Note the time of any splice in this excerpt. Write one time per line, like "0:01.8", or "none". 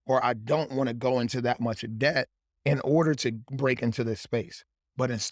none